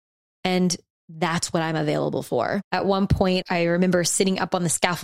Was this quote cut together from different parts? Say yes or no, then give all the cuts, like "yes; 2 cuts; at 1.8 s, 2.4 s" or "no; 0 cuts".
yes; 2 cuts; at 2.6 s, 3.4 s